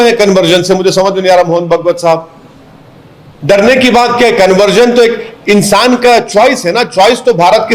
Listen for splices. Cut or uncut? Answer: uncut